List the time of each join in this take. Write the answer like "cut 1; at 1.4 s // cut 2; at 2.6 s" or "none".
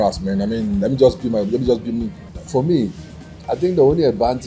cut 1; at 2.2 s

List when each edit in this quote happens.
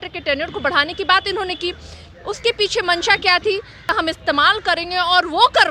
cut 1; at 4.0 s

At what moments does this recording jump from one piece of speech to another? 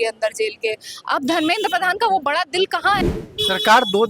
cut 1; at 3.0 s

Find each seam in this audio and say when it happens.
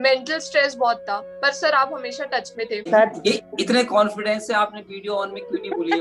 cut 1; at 2.9 s

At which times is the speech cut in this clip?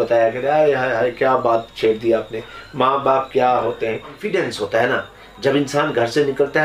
cut 1; at 4.2 s

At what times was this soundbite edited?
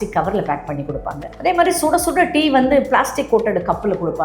cut 1; at 1.2 s

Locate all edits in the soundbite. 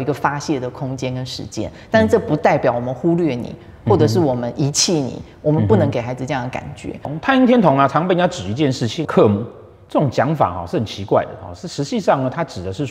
cut 1; at 7.1 s

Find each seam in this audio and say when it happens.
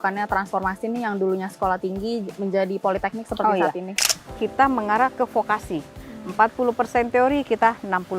cut 1; at 4.0 s

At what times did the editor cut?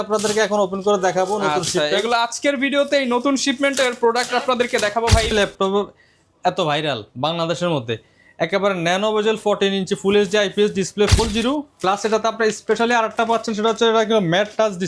cut 1; at 5.3 s // cut 2; at 11.2 s

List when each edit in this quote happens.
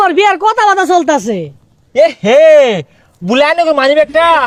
none

